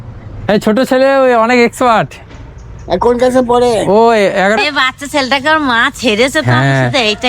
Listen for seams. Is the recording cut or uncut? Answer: cut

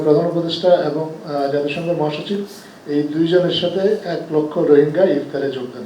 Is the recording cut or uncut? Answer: uncut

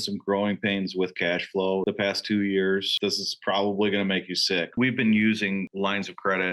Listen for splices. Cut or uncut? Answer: cut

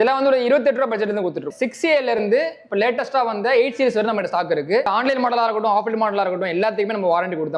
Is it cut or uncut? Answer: cut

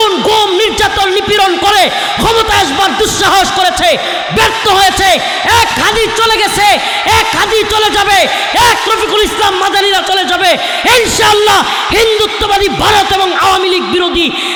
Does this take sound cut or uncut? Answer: uncut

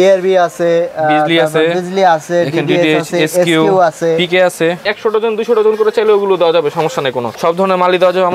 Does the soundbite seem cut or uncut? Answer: cut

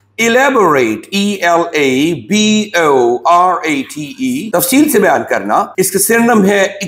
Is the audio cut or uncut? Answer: cut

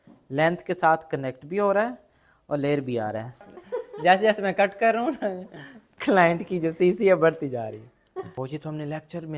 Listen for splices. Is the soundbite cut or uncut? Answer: cut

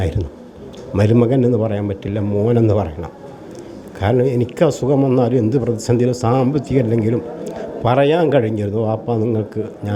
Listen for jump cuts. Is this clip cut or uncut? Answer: uncut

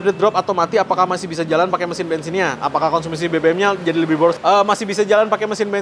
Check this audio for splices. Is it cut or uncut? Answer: uncut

